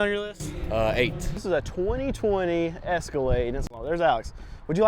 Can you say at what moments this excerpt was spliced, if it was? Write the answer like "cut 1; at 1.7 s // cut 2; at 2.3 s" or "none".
cut 1; at 1.4 s // cut 2; at 3.7 s